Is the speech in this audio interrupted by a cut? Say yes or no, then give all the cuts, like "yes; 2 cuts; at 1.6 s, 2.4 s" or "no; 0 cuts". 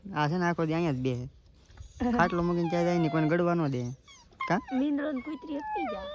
no; 0 cuts